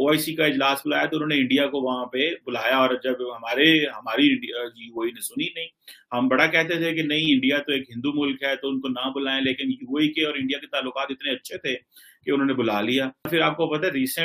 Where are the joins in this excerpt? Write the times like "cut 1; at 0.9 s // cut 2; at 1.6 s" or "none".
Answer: cut 1; at 13.3 s